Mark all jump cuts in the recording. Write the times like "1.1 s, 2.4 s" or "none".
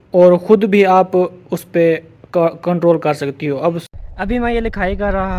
3.8 s